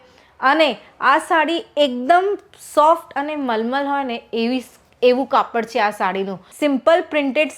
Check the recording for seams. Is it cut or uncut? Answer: cut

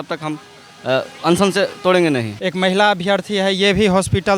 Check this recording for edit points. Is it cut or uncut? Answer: cut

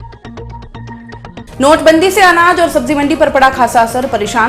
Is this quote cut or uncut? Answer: uncut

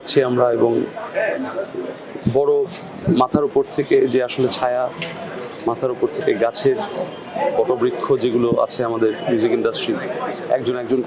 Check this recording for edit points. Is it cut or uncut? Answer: uncut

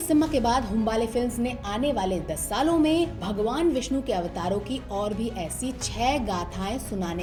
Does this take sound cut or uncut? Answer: uncut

